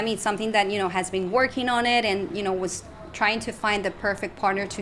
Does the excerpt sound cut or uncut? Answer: uncut